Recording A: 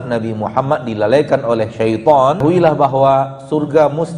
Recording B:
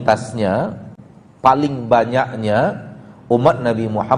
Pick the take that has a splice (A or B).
A